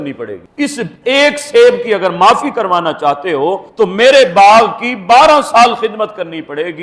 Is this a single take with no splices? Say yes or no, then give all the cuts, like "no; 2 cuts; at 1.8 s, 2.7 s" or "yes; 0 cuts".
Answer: yes; 0 cuts